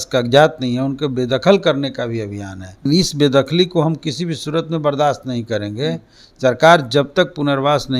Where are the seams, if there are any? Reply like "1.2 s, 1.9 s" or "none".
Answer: 2.9 s